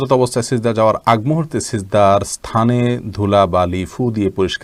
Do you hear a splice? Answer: no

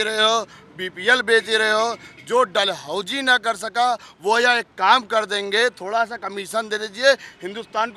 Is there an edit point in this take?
no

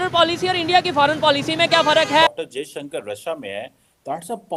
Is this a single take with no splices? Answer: yes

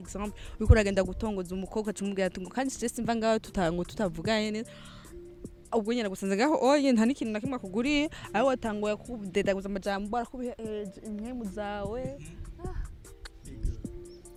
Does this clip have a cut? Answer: no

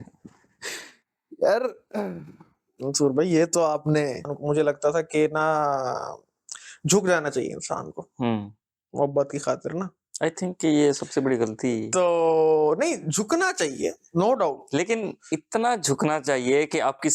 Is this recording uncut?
no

